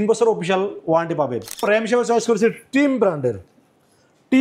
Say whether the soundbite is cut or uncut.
cut